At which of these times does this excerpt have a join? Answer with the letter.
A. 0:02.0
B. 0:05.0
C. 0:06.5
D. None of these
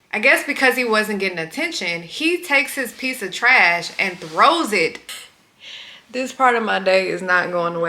B